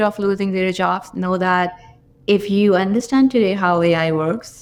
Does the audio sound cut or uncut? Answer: uncut